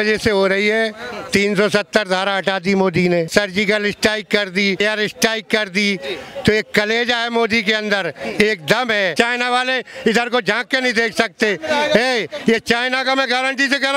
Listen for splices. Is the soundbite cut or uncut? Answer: cut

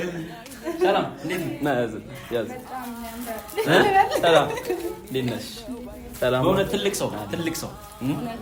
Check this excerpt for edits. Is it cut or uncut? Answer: uncut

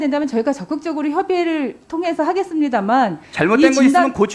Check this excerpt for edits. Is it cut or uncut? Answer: uncut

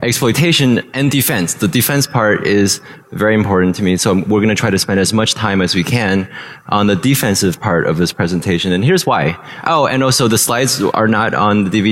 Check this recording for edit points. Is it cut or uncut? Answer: cut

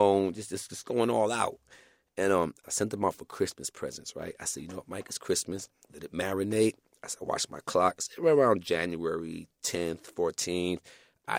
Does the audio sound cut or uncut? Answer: cut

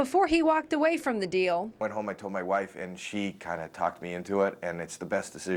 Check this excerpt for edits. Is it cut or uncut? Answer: uncut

